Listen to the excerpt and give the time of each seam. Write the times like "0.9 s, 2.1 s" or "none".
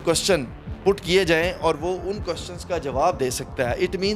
none